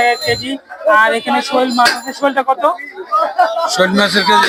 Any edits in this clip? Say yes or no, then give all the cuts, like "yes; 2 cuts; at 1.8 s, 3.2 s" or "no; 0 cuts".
no; 0 cuts